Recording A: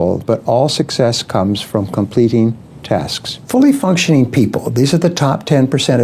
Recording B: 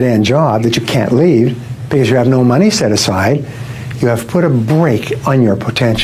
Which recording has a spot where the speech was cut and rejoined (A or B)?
A